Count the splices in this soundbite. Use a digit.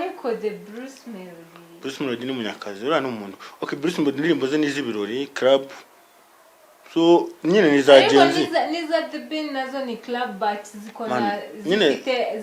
0